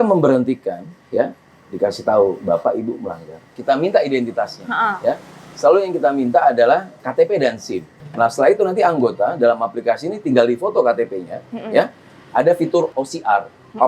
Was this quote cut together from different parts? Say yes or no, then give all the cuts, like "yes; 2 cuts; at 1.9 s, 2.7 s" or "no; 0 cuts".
yes; 4 cuts; at 3.5 s, 7.0 s, 8.0 s, 12.9 s